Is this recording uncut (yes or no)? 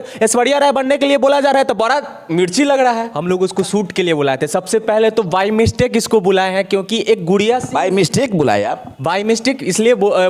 no